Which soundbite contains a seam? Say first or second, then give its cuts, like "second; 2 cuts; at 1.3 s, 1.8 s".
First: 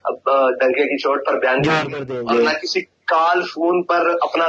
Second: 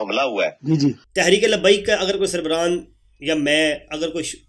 second; 1 cut; at 1.0 s